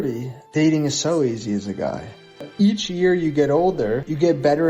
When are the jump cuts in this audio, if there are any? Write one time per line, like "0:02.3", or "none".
0:02.4